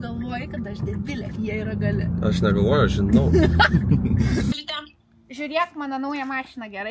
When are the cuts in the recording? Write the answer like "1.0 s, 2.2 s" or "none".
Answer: 4.5 s